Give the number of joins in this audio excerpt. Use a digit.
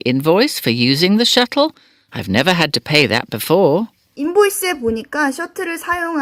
0